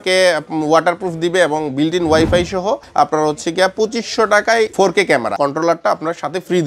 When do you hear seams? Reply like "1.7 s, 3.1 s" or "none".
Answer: 2.8 s, 5.3 s

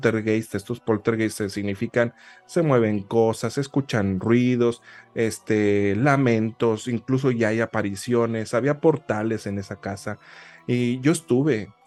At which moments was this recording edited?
none

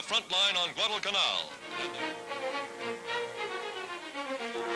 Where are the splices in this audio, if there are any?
1.6 s

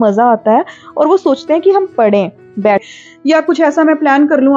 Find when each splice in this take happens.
2.8 s

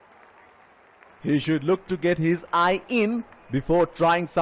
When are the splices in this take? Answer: 1.2 s

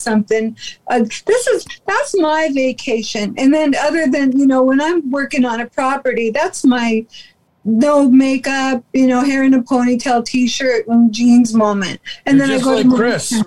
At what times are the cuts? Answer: none

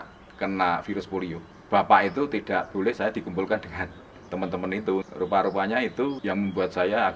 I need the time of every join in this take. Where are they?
1.5 s, 5.0 s, 6.2 s

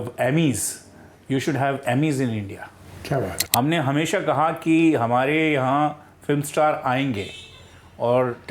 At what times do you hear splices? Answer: 3.4 s

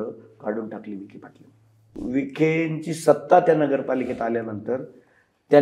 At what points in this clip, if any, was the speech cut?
2.0 s

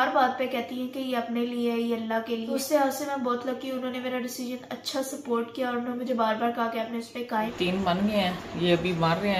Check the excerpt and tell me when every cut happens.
2.5 s, 7.5 s

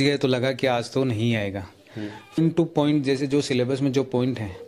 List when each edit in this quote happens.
2.4 s

